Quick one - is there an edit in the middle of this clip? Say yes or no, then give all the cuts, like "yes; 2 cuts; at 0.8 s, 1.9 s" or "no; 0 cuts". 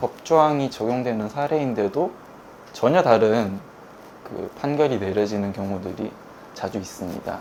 no; 0 cuts